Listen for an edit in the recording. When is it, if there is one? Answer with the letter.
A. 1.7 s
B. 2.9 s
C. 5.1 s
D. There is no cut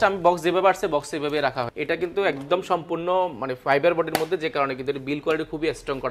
A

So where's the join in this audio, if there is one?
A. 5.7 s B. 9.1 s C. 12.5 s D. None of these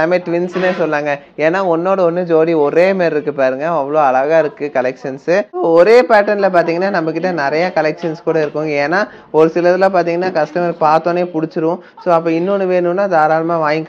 A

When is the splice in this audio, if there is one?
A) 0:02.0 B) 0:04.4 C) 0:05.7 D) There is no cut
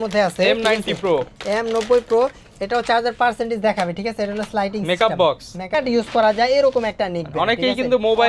C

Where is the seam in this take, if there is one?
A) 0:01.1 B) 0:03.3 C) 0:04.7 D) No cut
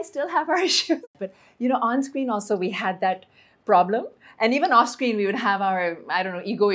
A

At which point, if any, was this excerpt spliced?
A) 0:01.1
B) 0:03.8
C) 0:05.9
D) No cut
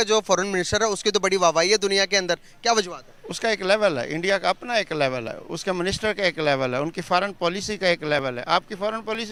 D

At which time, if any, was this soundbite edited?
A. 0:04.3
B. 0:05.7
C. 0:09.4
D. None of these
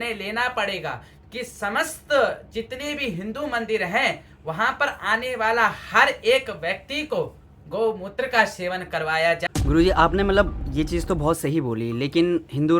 C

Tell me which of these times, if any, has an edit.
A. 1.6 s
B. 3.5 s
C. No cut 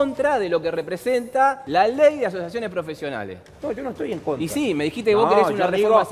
A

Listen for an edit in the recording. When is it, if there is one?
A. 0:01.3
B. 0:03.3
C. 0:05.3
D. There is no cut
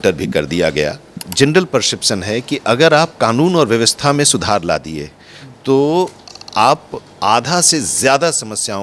A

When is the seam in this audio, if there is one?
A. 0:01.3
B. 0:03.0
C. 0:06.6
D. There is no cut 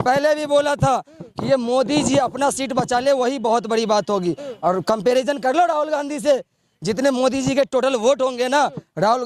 D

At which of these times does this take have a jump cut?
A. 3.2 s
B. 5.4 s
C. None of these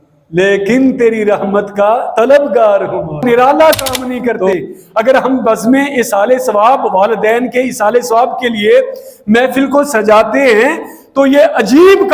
A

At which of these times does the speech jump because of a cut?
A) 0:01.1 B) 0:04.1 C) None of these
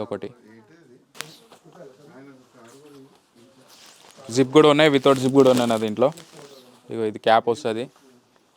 A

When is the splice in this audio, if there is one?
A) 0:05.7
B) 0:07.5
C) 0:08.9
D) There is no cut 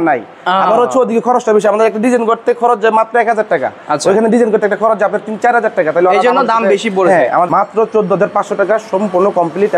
B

